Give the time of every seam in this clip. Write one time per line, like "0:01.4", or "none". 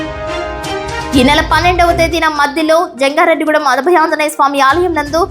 0:01.1